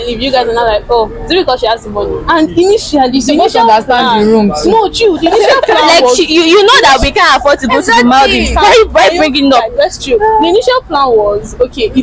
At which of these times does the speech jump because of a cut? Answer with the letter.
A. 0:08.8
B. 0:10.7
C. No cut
C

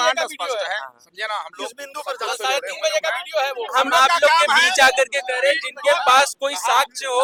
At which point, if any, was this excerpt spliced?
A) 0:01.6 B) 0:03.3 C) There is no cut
C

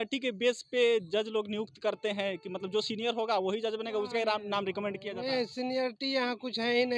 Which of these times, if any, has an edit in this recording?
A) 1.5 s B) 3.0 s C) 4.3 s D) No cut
D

